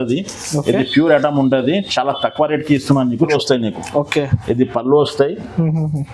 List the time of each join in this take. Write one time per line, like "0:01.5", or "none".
0:03.3